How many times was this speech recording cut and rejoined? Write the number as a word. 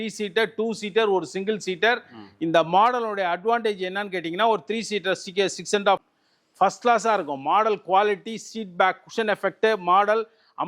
one